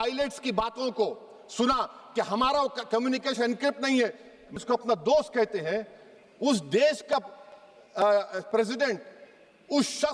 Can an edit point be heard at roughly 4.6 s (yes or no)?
yes